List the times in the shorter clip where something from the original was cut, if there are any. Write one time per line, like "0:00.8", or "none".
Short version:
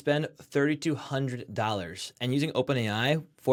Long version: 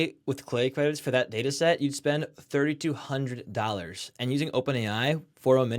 none